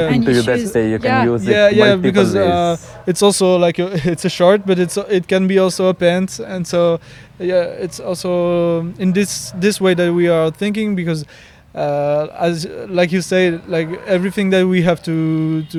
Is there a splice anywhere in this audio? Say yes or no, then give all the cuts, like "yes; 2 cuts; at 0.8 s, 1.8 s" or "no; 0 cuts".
no; 0 cuts